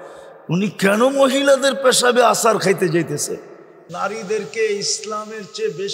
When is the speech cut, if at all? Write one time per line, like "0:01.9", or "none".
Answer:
0:03.8